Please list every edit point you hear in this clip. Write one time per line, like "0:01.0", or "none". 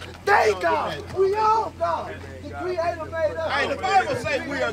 none